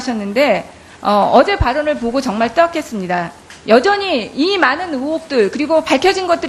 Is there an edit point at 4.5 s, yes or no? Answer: no